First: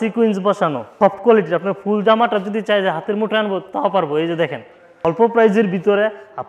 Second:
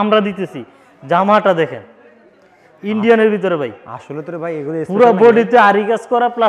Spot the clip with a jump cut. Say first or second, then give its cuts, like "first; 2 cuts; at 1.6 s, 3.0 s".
first; 2 cuts; at 0.9 s, 5.0 s